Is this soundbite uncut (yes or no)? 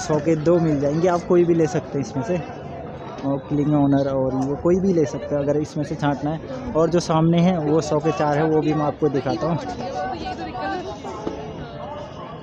yes